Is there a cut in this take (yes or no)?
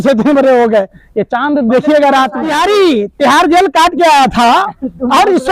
yes